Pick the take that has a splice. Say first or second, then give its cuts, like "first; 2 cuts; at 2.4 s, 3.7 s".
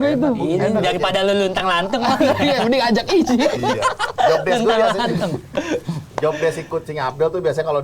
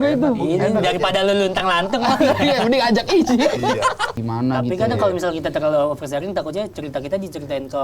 second; 1 cut; at 4.1 s